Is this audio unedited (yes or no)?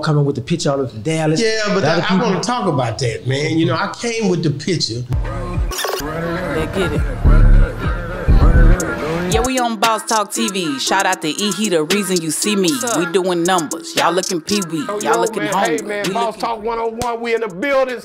yes